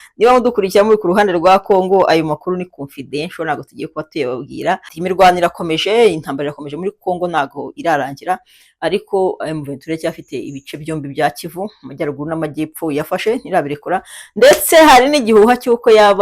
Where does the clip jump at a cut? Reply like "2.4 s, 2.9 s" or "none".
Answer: 4.9 s